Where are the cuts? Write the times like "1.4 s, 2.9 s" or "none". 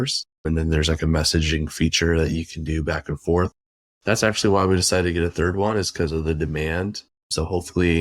3.8 s

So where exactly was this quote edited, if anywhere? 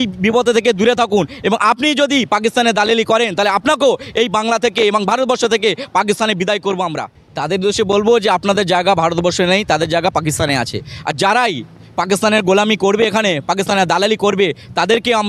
none

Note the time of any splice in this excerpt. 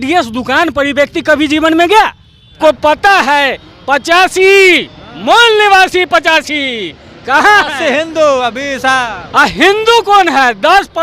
2.5 s

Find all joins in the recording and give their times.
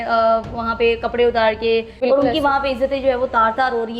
2.0 s

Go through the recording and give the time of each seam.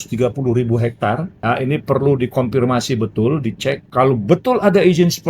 1.3 s, 3.8 s

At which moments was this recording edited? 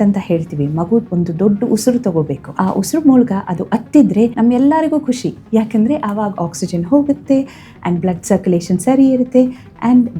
1.1 s, 2.4 s, 4.3 s

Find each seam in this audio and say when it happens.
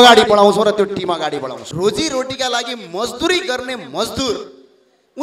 1.6 s

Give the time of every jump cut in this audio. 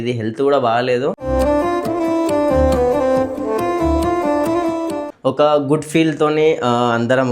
5.1 s

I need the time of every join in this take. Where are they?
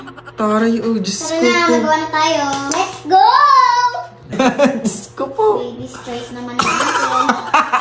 4.3 s

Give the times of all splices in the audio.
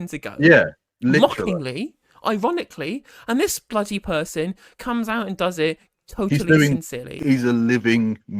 7.2 s

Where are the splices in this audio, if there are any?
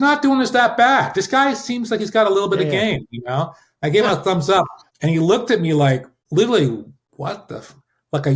4.9 s, 6.2 s, 7.0 s

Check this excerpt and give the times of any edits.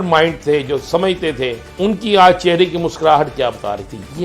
1.6 s

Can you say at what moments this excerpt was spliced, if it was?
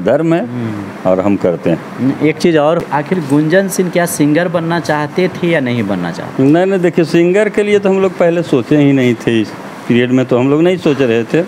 2.8 s

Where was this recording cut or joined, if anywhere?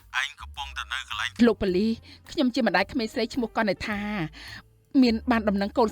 1.4 s

